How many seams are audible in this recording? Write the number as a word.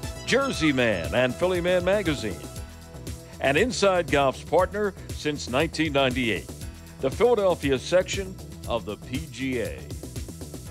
one